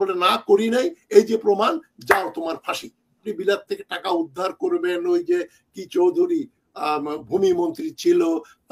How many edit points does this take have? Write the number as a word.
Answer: one